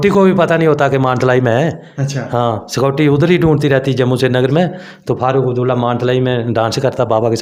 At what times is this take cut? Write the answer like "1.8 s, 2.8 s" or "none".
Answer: none